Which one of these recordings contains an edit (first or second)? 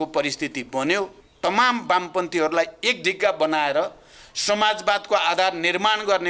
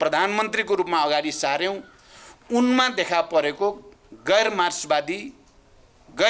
first